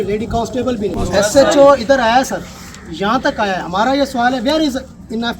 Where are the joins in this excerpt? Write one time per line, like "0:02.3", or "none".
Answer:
0:00.9